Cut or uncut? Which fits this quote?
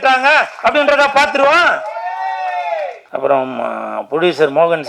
cut